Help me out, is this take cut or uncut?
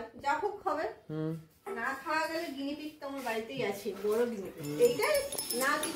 uncut